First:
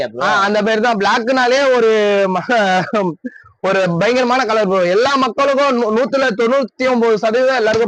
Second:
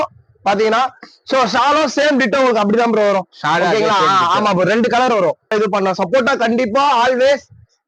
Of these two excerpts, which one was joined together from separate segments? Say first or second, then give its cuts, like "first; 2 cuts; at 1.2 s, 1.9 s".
second; 1 cut; at 5.5 s